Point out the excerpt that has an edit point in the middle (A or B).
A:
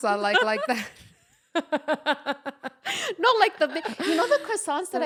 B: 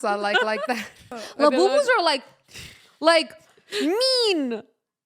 B